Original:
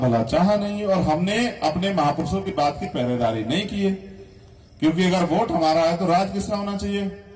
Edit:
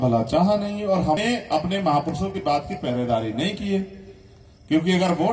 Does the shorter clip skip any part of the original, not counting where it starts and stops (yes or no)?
yes